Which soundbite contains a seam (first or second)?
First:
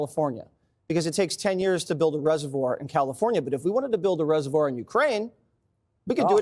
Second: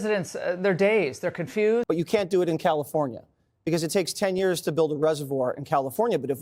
second